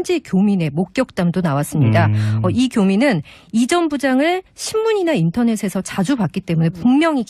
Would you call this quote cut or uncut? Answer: cut